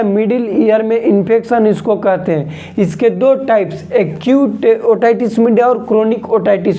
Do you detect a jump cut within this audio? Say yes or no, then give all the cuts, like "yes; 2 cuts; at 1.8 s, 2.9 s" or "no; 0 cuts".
no; 0 cuts